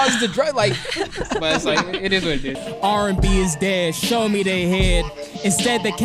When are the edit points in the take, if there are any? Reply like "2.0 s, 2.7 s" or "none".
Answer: 2.6 s